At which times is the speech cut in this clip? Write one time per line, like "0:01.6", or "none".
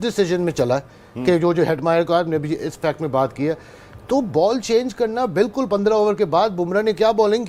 0:01.1